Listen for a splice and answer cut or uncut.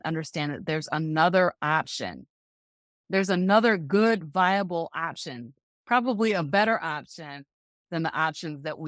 uncut